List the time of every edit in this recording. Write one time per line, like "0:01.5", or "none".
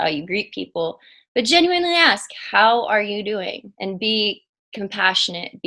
0:03.7